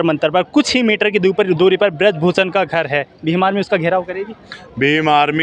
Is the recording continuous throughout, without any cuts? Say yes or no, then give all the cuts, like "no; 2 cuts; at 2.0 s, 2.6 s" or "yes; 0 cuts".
yes; 0 cuts